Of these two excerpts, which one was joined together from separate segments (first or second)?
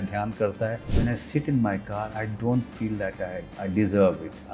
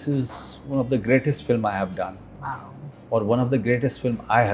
first